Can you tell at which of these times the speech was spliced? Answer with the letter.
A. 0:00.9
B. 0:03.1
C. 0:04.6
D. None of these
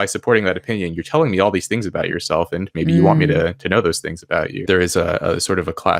C